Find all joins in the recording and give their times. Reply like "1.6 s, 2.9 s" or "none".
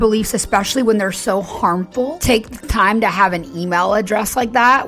2.2 s